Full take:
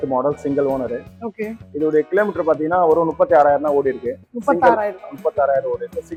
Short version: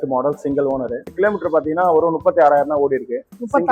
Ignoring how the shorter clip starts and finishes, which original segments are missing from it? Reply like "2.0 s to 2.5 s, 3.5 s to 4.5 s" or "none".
1.1 s to 2.1 s